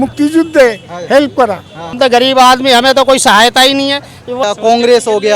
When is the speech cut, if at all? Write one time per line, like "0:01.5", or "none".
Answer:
0:01.9
0:04.4